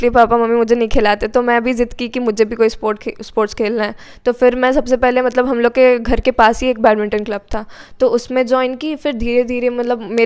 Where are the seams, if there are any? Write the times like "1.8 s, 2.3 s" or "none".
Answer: none